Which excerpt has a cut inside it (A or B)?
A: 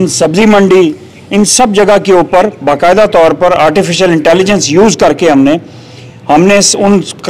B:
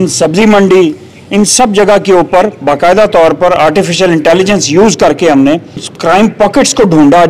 B